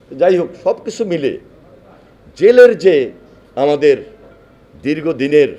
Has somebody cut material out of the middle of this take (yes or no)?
no